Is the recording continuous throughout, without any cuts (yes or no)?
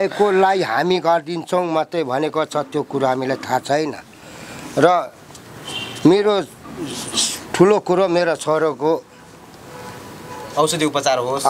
yes